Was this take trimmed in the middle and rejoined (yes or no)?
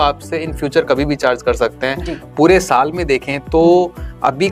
yes